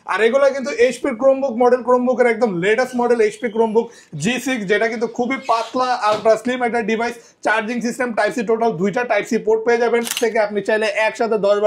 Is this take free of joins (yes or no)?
no